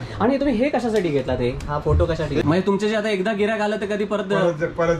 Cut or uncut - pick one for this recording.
cut